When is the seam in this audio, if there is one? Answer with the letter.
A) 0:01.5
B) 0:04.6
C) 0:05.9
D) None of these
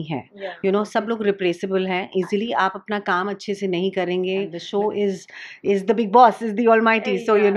B